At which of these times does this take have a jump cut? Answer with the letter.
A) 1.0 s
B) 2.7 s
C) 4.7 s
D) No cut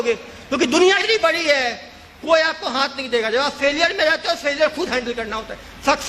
A